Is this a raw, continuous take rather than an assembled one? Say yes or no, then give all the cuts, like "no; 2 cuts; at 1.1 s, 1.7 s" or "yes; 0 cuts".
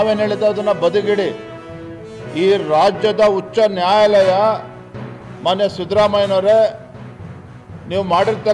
yes; 0 cuts